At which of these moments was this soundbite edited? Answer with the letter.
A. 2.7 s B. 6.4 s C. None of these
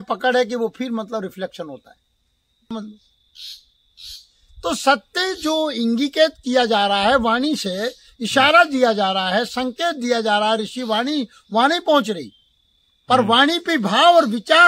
A